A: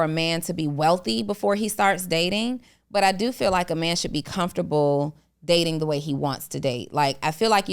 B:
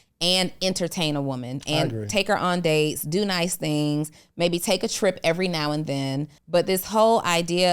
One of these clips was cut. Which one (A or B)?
B